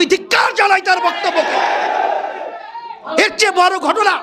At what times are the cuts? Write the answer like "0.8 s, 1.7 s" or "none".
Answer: none